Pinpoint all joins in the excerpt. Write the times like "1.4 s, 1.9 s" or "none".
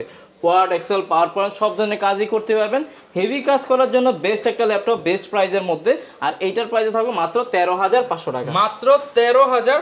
none